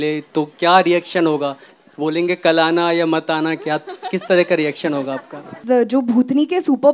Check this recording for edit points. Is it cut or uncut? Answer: cut